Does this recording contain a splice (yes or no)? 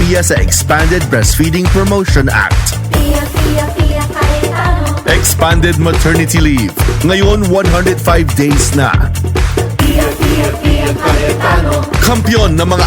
no